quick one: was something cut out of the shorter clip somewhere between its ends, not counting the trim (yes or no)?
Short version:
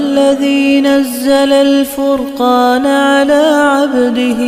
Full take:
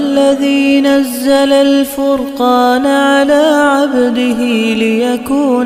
no